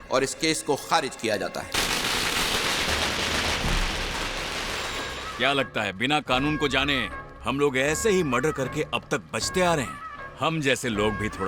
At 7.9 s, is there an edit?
no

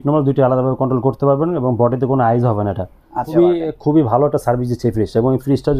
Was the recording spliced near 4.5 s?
no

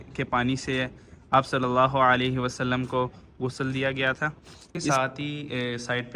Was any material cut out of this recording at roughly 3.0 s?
no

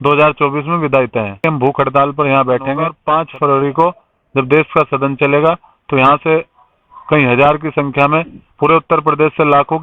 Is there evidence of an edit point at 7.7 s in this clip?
no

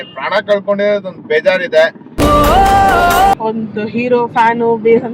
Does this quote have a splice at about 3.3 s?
yes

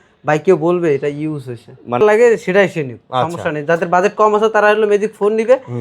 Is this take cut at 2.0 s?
yes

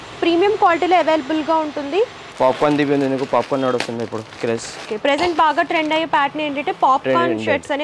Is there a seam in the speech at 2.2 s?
yes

